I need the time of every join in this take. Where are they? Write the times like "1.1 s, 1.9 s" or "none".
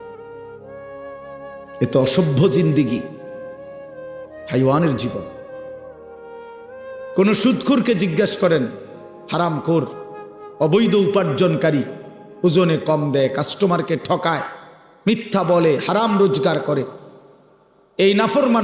1.3 s